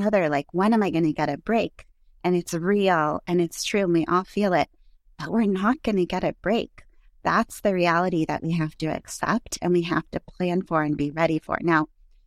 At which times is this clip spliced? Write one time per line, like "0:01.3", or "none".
none